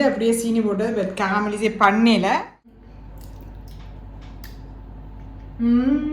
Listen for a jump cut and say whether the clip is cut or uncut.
cut